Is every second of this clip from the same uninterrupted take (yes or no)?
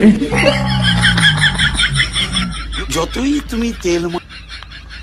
yes